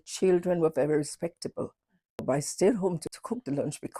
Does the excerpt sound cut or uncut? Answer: cut